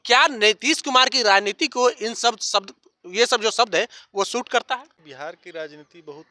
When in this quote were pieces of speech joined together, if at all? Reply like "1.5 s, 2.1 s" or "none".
5.0 s